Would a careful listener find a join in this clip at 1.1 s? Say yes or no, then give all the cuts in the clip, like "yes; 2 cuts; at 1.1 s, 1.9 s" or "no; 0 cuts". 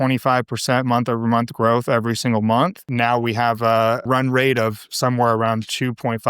no; 2 cuts; at 2.8 s, 4.0 s